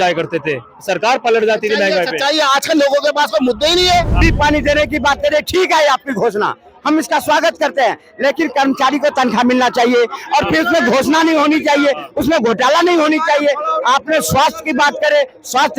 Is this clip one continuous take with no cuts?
no; 1 cut; at 4.2 s

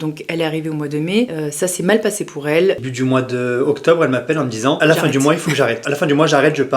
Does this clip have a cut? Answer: yes; 4 cuts; at 1.3 s, 2.8 s, 4.8 s, 5.8 s

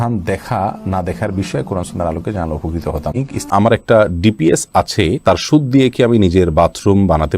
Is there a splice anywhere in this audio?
yes; 1 cut; at 3.4 s

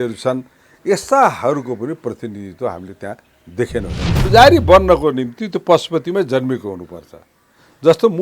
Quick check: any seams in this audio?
yes; 1 cut; at 4.2 s

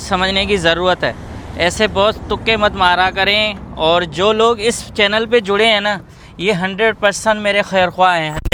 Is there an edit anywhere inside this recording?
no; 0 cuts

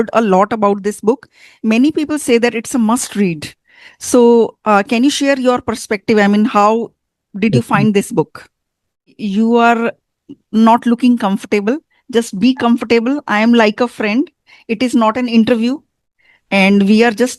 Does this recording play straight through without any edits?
no; 1 cut; at 9.1 s

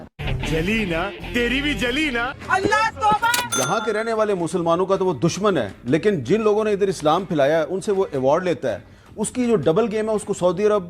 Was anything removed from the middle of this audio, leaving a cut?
yes; 1 cut; at 3.5 s

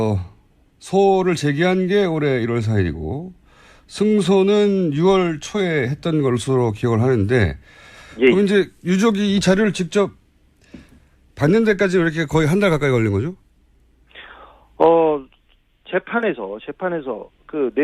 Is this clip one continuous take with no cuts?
no; 1 cut; at 16.9 s

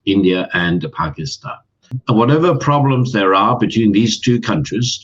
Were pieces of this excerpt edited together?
yes; 1 cut; at 2.0 s

